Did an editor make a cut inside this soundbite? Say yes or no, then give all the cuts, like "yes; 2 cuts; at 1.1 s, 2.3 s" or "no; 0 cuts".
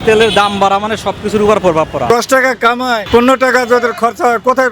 yes; 2 cuts; at 2.1 s, 3.0 s